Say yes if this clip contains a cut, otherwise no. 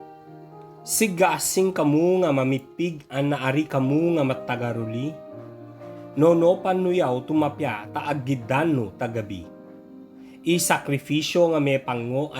yes